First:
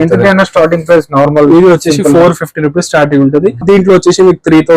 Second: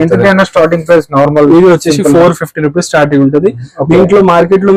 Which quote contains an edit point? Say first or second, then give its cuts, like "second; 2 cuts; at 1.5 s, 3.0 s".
first; 1 cut; at 3.6 s